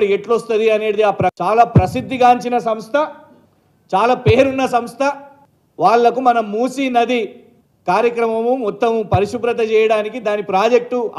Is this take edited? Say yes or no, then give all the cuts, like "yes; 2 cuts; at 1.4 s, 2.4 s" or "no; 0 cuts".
yes; 1 cut; at 1.3 s